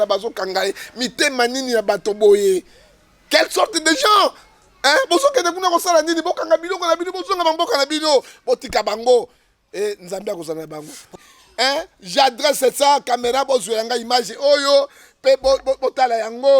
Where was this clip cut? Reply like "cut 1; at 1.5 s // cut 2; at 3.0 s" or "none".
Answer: cut 1; at 11.1 s